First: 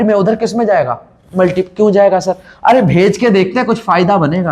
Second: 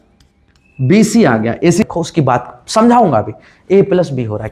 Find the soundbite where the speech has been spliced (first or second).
second